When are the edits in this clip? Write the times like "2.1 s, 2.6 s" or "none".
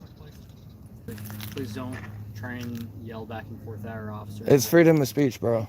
1.0 s